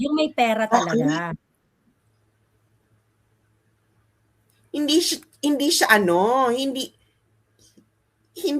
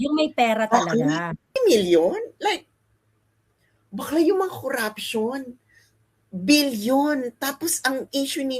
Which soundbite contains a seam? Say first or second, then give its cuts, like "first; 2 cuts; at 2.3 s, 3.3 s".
second; 1 cut; at 1.6 s